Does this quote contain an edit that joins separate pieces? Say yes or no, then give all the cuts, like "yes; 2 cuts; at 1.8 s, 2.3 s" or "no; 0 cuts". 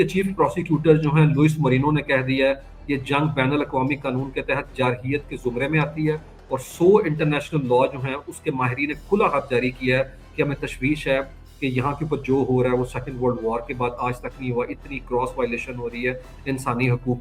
no; 0 cuts